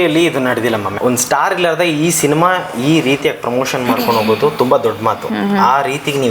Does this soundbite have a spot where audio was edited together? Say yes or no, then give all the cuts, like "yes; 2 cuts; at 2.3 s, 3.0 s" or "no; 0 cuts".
yes; 1 cut; at 0.9 s